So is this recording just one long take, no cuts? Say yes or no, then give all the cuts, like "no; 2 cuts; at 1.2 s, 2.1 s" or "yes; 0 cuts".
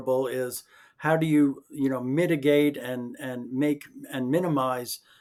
yes; 0 cuts